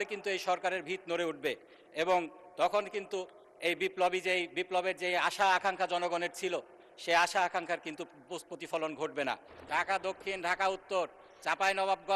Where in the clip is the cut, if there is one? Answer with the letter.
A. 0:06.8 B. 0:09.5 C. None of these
B